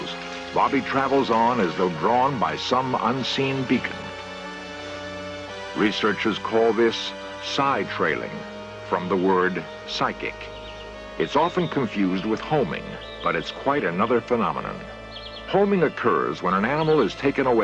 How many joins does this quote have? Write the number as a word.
one